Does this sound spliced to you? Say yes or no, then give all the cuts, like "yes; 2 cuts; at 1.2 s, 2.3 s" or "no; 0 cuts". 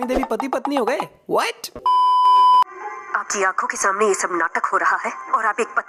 no; 0 cuts